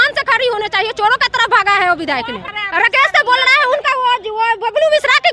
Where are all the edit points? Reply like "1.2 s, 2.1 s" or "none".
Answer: 2.6 s